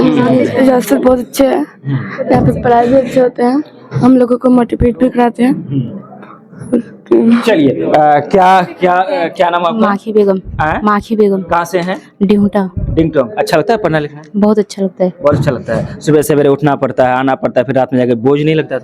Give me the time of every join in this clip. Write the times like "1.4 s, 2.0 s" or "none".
none